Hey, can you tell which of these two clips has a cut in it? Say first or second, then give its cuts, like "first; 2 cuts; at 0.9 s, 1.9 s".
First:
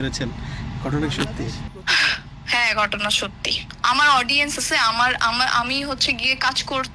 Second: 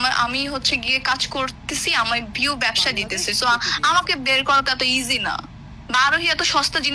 first; 1 cut; at 3.6 s